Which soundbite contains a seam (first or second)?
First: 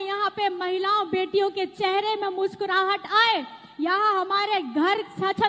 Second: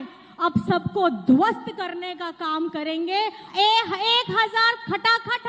second